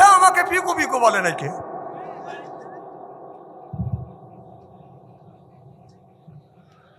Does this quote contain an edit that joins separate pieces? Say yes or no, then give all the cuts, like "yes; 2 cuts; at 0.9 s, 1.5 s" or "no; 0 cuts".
no; 0 cuts